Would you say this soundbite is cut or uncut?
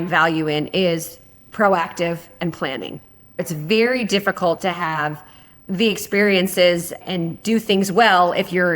cut